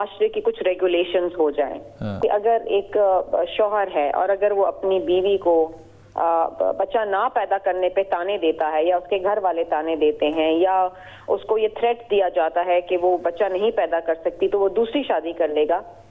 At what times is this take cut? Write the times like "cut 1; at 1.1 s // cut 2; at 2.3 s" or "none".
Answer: cut 1; at 2.2 s